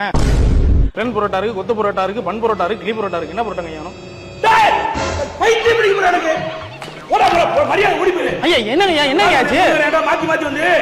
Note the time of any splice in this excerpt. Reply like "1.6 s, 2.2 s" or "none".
none